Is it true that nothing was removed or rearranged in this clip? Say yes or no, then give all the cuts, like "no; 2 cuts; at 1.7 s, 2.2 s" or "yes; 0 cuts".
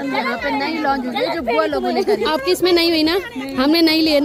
yes; 0 cuts